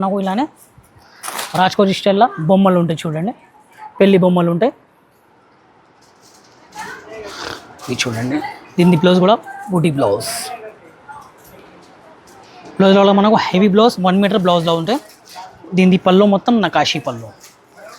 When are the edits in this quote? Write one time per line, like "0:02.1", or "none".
none